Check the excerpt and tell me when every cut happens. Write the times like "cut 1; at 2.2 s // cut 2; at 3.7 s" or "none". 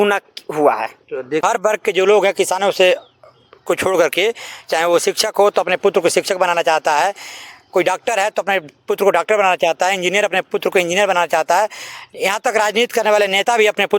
cut 1; at 1.4 s